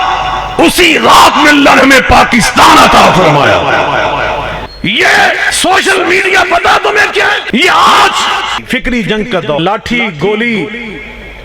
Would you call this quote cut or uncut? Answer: cut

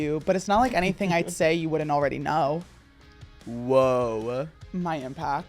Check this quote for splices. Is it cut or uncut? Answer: cut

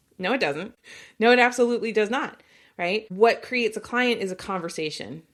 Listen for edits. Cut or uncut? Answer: uncut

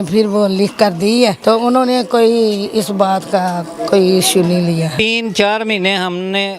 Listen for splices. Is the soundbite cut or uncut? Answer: cut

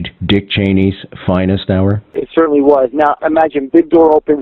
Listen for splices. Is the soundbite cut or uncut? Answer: cut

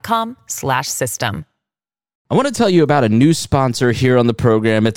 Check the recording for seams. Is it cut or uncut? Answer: cut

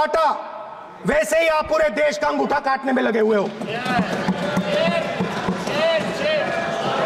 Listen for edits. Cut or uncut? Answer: uncut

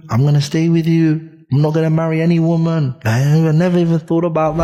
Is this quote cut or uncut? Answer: uncut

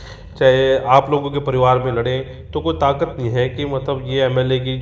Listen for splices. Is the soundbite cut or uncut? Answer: uncut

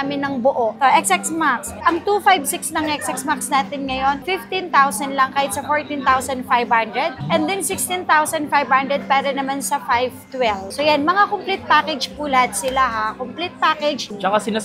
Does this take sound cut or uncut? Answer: uncut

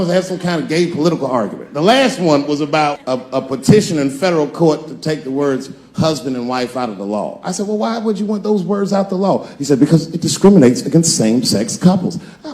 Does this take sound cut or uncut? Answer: cut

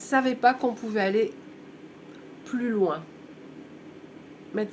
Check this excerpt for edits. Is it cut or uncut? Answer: uncut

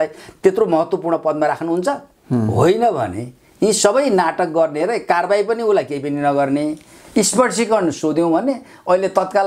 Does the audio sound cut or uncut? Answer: uncut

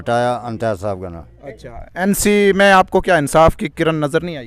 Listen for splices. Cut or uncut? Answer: uncut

